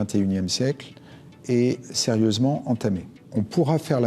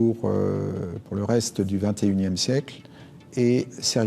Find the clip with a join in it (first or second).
first